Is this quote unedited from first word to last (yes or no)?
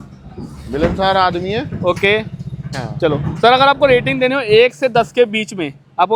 yes